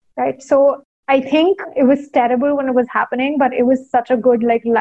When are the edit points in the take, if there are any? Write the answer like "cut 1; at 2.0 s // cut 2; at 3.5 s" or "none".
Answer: cut 1; at 1.4 s

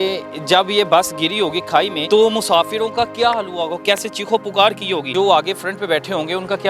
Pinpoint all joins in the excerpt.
cut 1; at 2.0 s // cut 2; at 5.1 s

